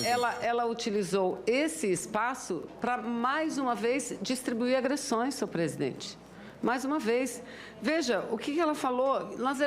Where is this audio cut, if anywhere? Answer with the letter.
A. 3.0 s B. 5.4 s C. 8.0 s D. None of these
C